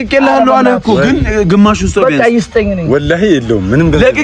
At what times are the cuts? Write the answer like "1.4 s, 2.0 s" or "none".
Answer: none